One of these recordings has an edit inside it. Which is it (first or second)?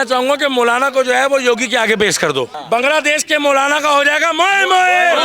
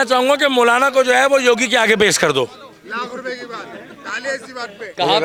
first